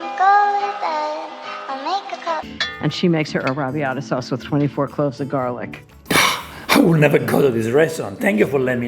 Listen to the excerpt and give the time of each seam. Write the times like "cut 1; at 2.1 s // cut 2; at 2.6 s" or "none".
cut 1; at 2.5 s